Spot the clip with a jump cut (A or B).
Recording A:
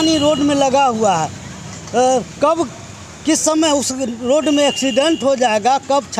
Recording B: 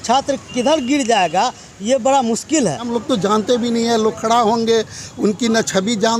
B